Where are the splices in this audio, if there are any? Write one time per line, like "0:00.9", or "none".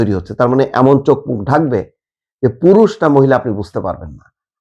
none